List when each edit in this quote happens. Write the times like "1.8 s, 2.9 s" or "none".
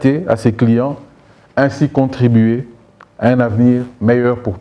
none